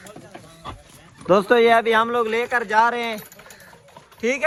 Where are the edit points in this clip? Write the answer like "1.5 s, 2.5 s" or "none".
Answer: none